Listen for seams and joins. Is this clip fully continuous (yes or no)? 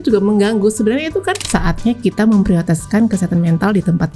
no